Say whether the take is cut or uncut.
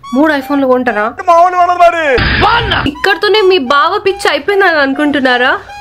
cut